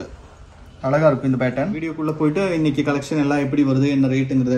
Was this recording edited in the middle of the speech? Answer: yes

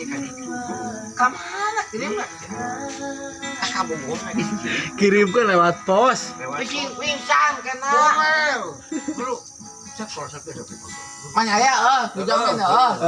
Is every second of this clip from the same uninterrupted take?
no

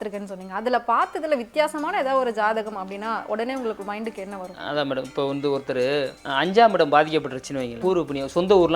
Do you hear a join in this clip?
yes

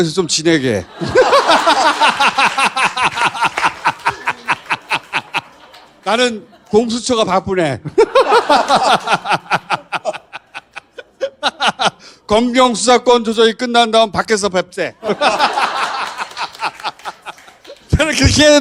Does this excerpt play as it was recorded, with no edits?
yes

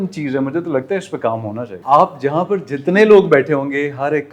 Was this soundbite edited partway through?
yes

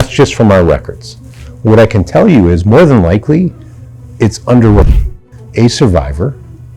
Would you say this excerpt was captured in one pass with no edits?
no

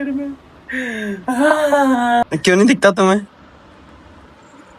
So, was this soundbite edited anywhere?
yes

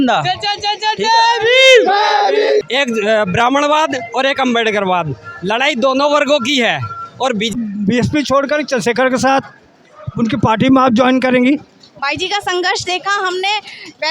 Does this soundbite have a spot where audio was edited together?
yes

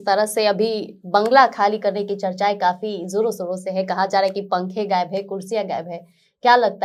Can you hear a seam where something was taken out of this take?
no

